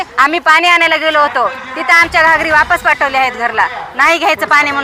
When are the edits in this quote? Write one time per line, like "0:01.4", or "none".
none